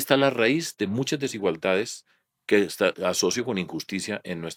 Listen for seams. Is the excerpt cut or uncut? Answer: uncut